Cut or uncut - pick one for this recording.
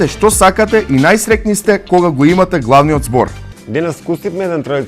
cut